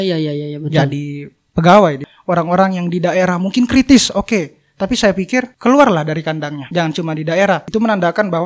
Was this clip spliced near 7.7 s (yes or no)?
yes